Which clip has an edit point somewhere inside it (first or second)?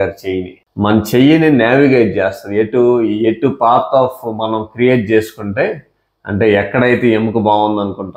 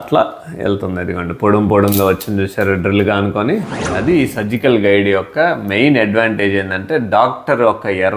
second